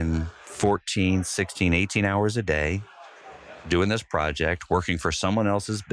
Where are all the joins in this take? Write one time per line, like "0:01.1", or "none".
none